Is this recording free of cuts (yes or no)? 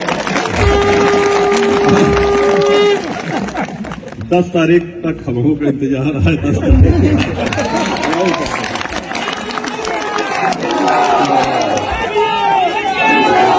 yes